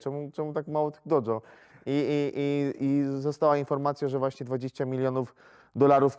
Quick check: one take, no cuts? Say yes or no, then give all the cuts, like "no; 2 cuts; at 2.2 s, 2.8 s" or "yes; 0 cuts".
yes; 0 cuts